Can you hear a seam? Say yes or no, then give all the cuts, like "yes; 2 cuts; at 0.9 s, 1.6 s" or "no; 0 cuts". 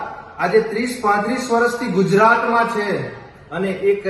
no; 0 cuts